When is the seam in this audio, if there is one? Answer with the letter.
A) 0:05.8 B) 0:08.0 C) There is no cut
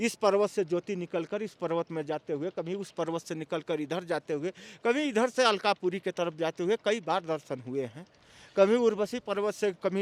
C